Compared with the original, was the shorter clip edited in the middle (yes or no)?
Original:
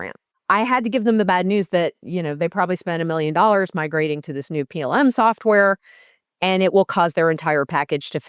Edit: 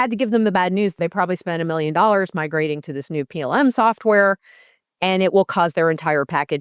yes